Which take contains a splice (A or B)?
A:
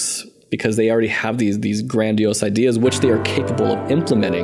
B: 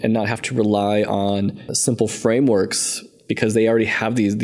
B